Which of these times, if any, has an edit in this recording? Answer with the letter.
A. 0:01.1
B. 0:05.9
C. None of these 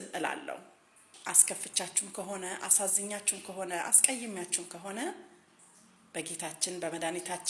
A